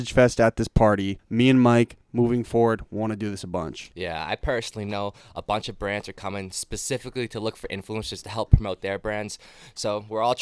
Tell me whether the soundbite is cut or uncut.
cut